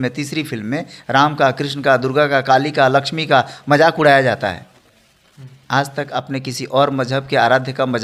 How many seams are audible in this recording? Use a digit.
0